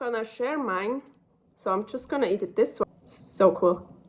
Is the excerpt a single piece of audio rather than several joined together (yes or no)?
no